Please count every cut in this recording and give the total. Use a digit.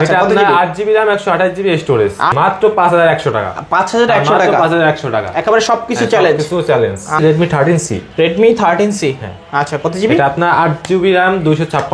2